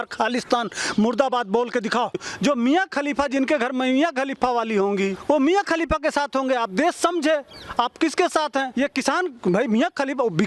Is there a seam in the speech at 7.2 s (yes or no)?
no